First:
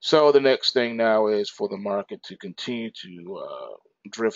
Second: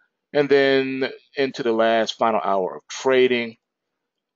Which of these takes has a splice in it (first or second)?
second